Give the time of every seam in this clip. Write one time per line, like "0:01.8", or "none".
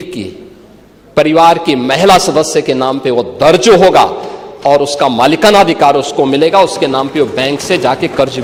none